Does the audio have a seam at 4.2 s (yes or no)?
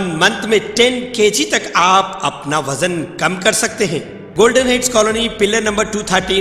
yes